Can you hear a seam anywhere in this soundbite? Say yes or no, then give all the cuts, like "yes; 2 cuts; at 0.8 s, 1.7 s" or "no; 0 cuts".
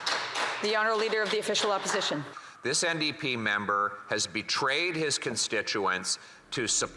yes; 1 cut; at 2.4 s